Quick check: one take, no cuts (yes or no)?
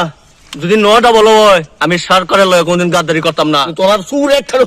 no